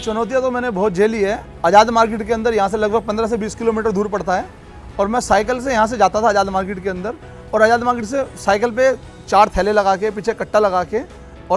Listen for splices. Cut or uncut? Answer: uncut